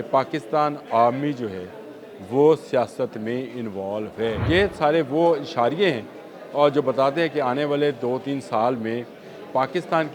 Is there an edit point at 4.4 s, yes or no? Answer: yes